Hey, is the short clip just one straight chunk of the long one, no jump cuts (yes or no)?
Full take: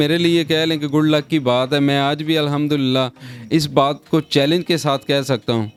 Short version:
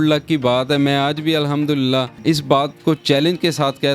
no